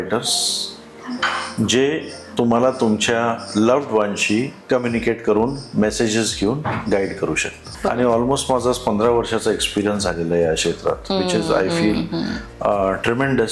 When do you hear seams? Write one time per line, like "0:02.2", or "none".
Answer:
0:07.7